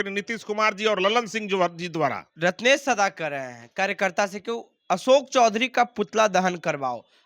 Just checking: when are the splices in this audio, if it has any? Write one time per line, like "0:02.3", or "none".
0:02.3